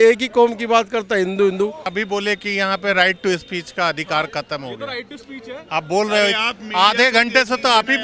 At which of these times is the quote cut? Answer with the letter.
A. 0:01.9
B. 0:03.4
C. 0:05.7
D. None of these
A